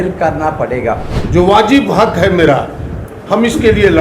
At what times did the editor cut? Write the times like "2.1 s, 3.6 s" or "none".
1.1 s

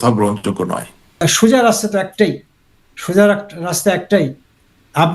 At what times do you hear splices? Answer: 1.2 s

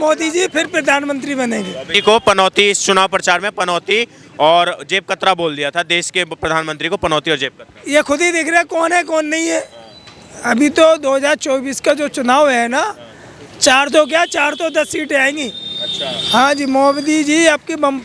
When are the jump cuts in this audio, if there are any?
1.9 s

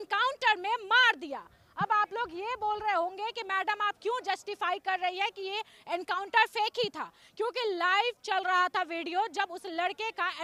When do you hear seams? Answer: none

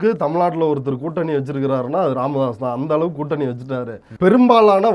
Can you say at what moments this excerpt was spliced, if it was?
4.0 s

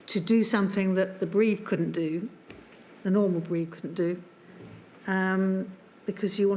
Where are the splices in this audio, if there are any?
none

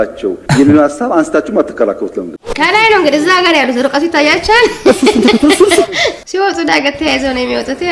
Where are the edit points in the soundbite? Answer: 2.4 s, 6.2 s

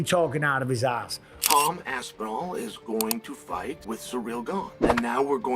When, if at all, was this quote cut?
1.1 s, 3.8 s, 4.8 s

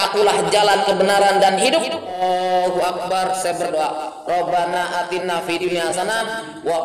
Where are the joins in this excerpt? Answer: 2.2 s

